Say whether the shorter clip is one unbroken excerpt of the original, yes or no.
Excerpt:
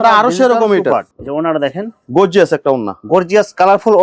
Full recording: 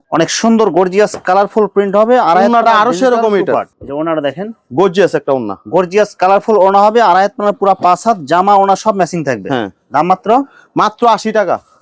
yes